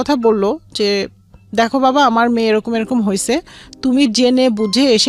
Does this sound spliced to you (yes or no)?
no